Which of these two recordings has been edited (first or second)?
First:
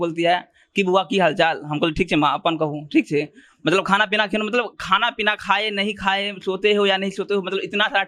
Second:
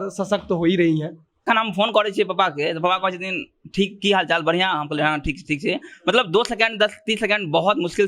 second